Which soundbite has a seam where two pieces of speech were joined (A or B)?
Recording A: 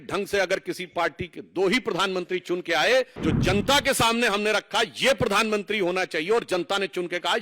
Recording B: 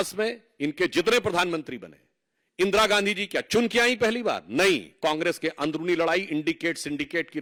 A